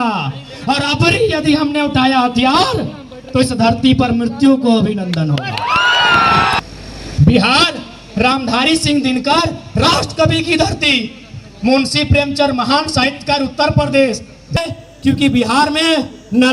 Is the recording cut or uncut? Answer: cut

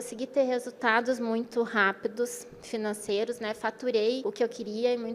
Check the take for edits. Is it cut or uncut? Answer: cut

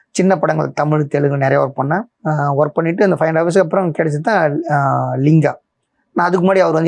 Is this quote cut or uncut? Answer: uncut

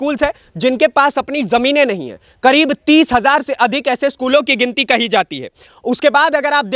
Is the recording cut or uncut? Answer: uncut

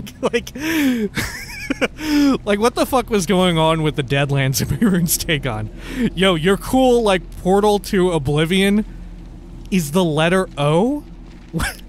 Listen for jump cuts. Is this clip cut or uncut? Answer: uncut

